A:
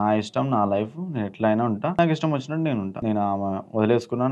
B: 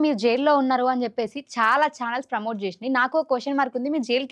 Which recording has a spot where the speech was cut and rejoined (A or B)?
A